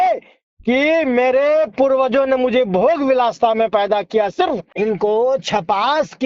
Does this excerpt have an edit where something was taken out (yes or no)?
yes